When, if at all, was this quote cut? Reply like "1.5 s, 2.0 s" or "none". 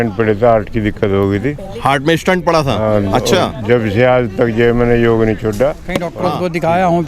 6.2 s